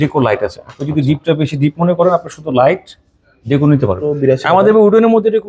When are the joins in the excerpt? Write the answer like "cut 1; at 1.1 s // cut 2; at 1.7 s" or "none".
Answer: cut 1; at 4.1 s